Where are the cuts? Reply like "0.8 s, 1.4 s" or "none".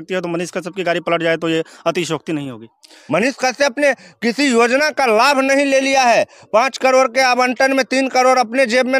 2.9 s